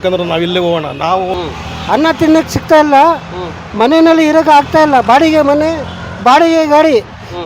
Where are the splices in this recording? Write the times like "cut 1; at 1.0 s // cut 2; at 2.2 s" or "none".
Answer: cut 1; at 1.3 s